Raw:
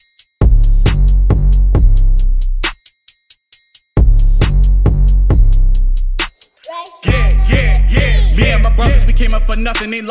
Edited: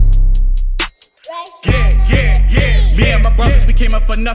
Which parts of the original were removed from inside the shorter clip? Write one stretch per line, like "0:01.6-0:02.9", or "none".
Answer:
0:02.9-0:06.5

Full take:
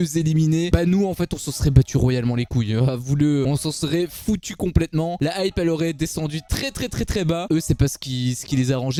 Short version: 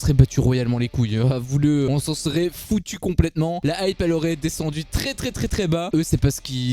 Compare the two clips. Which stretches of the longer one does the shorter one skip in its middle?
none

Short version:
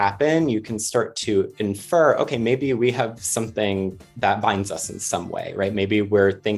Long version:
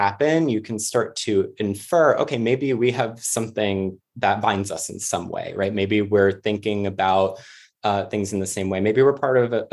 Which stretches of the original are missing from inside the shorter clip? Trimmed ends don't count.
none

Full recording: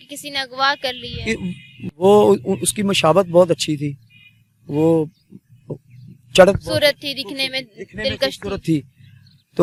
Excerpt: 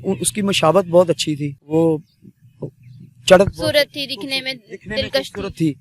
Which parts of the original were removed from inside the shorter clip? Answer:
0:04.0-0:04.7

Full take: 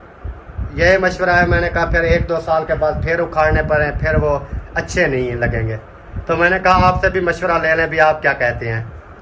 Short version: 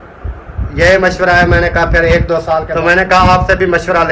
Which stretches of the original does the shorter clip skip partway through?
0:02.7-0:06.2

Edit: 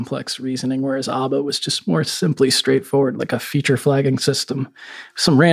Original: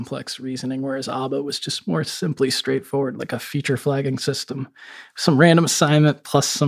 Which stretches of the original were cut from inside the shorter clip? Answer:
none

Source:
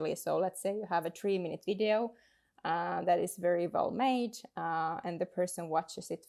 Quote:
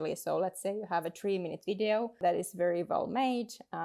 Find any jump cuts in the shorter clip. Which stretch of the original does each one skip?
0:02.2-0:03.0

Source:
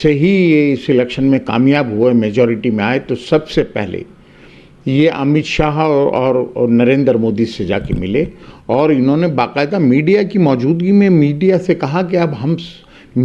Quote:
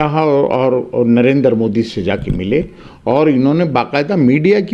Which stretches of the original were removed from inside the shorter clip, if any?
none

